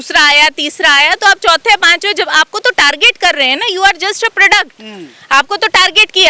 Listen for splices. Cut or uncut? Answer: uncut